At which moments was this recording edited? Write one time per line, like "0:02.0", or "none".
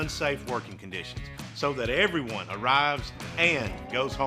none